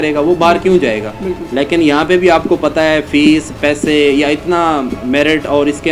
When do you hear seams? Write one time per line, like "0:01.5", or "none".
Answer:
none

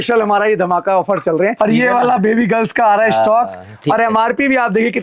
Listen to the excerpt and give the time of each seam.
0:01.5

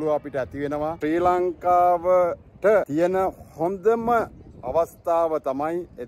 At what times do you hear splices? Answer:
0:01.0
0:02.9

